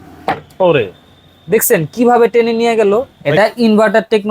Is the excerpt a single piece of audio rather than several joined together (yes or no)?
no